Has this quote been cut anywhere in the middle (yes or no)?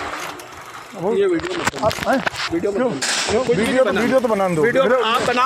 no